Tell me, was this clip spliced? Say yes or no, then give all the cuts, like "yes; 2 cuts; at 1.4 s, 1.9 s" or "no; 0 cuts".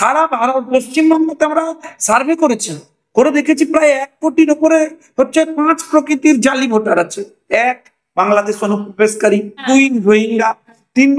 yes; 1 cut; at 9.6 s